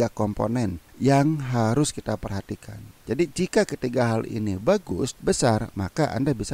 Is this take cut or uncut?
cut